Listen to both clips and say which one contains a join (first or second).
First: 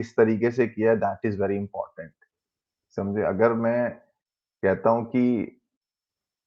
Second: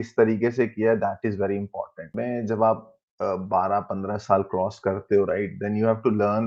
second